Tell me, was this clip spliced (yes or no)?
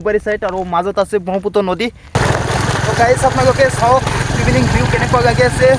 yes